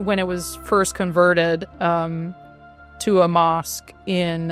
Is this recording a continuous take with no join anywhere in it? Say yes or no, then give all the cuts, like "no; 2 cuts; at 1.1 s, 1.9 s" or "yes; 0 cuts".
yes; 0 cuts